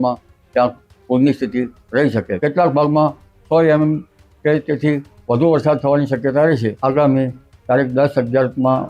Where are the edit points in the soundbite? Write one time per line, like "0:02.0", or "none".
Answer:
0:02.3
0:06.8